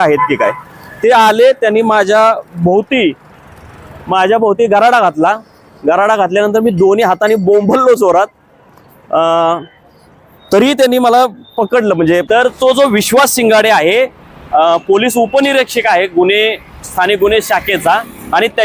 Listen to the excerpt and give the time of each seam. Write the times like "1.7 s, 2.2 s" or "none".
12.2 s